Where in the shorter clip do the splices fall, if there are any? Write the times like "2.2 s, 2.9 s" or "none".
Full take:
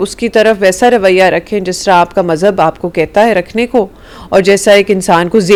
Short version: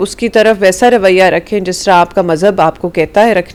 none